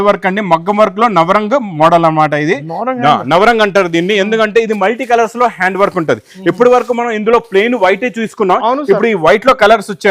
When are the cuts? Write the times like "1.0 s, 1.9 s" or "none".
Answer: none